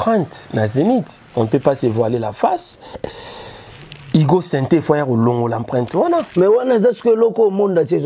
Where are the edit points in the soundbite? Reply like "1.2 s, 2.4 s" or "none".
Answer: none